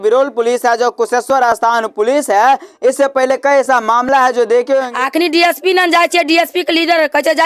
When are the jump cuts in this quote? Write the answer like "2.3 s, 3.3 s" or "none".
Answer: 4.9 s